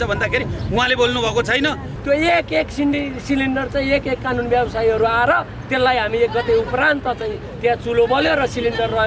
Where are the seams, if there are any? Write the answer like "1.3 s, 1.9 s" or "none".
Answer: 1.9 s